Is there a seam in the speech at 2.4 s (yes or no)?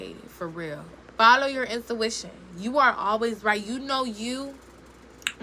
no